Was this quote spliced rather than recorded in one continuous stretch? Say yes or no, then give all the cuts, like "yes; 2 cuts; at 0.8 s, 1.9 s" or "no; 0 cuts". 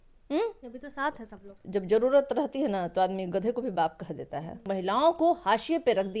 yes; 2 cuts; at 1.6 s, 4.7 s